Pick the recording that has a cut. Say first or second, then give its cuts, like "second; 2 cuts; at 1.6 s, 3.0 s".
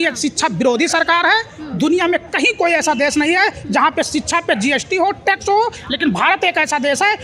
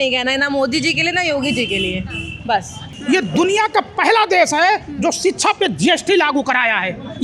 second; 1 cut; at 2.9 s